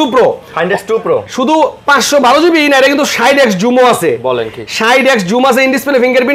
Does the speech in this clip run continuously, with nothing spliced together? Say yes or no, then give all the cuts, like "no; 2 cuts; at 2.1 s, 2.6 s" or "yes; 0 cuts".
yes; 0 cuts